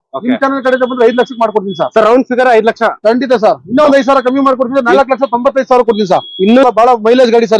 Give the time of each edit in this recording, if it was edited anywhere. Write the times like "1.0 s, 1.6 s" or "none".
6.7 s